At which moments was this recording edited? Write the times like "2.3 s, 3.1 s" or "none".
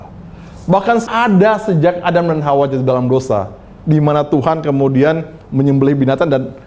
1.0 s